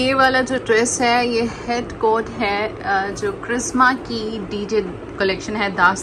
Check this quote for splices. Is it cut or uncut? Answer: uncut